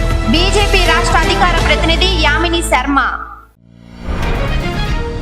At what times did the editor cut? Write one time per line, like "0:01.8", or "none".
0:03.4